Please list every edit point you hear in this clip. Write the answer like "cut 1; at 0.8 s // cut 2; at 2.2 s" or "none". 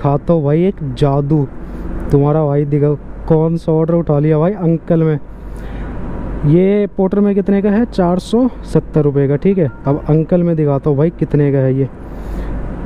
none